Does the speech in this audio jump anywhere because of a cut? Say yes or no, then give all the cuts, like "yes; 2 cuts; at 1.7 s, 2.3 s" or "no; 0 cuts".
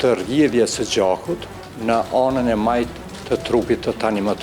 no; 0 cuts